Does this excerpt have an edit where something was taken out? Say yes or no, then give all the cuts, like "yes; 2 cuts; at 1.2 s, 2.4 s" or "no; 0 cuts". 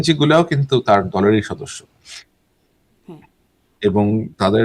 no; 0 cuts